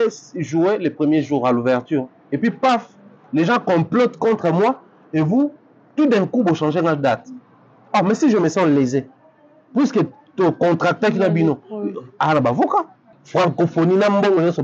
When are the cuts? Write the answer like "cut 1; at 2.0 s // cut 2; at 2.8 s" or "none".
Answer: cut 1; at 13.1 s